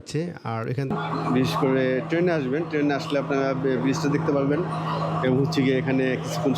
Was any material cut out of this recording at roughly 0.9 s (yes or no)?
yes